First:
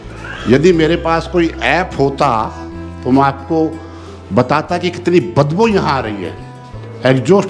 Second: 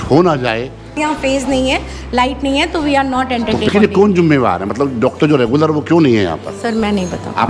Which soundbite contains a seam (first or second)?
second